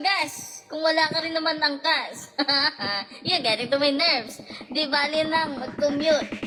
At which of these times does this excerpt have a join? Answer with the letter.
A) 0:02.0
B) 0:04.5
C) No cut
C